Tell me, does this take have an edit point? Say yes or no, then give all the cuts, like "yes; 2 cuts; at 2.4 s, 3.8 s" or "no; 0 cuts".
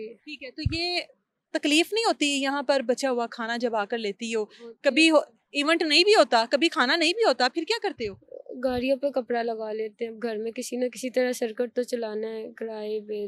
no; 0 cuts